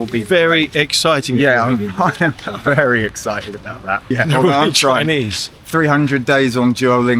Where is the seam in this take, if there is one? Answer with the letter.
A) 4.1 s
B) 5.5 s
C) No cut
A